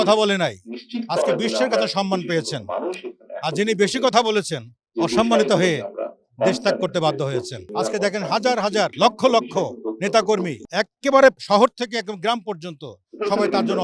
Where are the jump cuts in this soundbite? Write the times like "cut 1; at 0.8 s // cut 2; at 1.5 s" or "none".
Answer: cut 1; at 7.6 s // cut 2; at 8.9 s // cut 3; at 10.6 s // cut 4; at 11.4 s